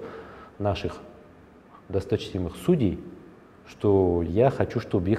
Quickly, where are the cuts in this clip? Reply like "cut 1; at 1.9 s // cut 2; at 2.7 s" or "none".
cut 1; at 4.3 s